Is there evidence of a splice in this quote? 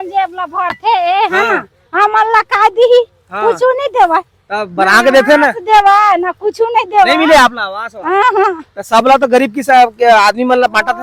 no; 0 cuts

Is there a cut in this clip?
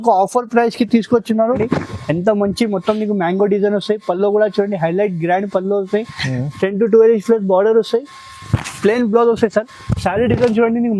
yes; 1 cut; at 1.5 s

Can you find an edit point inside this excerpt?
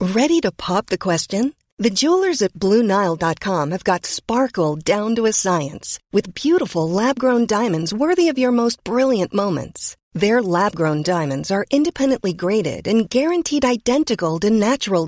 no; 0 cuts

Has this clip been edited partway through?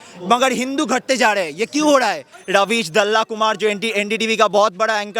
yes; 1 cut; at 2.3 s

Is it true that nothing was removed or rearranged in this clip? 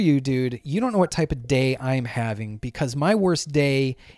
yes; 0 cuts

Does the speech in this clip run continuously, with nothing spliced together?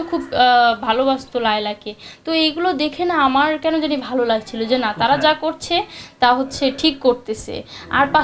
yes; 0 cuts

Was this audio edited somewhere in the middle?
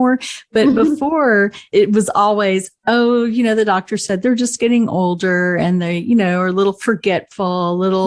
yes; 1 cut; at 1.6 s

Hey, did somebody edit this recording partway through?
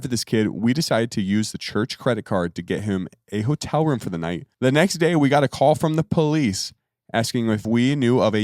yes; 2 cuts; at 4.5 s, 7.6 s

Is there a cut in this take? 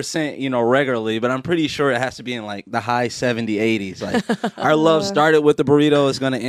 no; 0 cuts

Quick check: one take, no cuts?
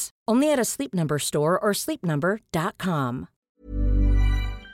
no; 1 cut; at 3.4 s

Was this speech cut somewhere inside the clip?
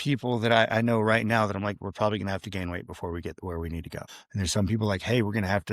yes; 1 cut; at 4.2 s

